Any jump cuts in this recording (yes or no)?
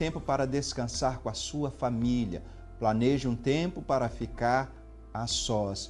no